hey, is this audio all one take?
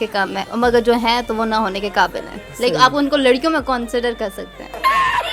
yes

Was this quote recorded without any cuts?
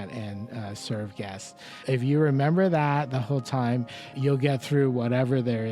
no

